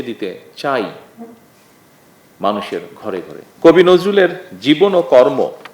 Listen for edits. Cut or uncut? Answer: cut